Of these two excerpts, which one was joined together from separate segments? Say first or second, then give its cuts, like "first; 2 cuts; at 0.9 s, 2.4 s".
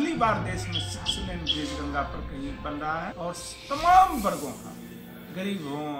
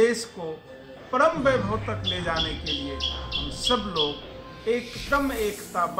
first; 1 cut; at 3.1 s